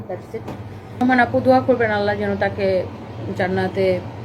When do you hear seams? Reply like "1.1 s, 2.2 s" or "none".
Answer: 1.0 s